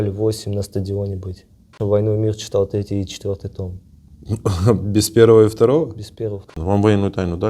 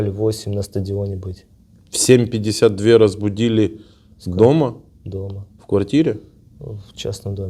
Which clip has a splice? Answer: first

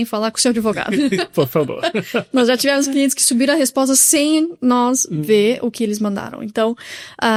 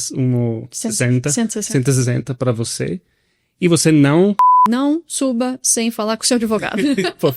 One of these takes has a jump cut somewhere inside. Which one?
second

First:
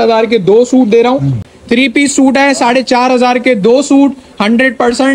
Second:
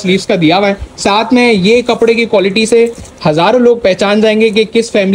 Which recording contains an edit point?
first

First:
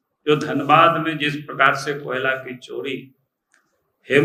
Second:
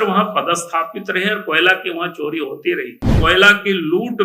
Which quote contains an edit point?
second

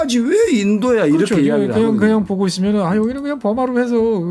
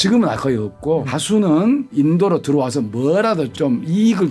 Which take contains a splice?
second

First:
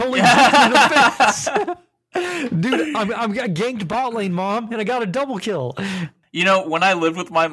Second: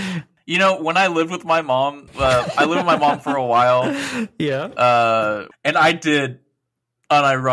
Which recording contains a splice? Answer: second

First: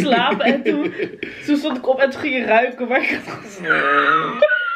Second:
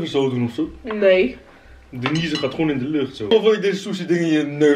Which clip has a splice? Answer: second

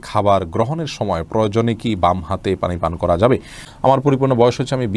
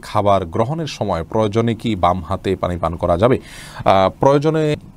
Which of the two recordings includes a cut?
first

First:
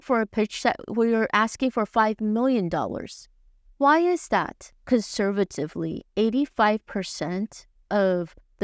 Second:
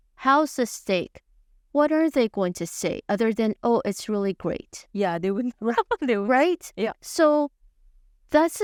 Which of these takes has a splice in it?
first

